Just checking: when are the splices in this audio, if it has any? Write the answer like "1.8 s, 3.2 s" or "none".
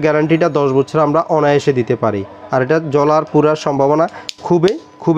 none